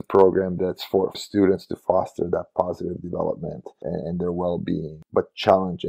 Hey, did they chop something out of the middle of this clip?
yes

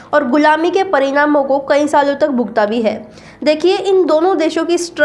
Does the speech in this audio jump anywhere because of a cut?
no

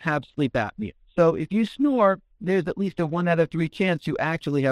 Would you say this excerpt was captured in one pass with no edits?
yes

